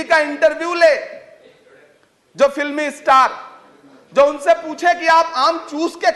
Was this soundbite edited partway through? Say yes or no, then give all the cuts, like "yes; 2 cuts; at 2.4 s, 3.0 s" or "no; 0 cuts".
no; 0 cuts